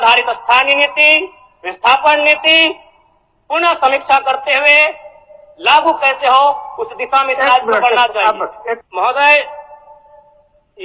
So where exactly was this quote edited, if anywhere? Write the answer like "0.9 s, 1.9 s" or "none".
8.9 s